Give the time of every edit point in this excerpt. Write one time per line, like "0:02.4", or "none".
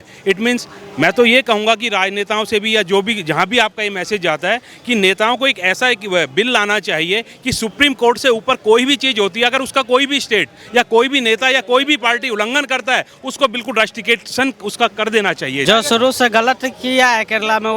0:15.6